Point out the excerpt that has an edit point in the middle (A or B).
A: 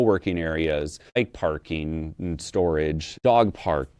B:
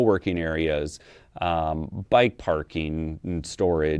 A